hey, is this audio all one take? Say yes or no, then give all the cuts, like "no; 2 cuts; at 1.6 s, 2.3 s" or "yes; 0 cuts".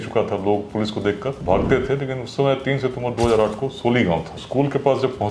no; 2 cuts; at 1.3 s, 4.4 s